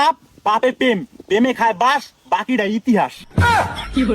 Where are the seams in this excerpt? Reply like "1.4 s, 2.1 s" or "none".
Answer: 3.2 s